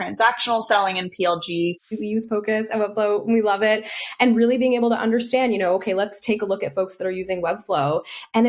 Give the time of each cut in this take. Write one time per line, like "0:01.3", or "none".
0:01.9